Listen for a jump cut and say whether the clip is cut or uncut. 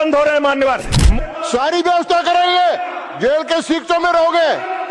cut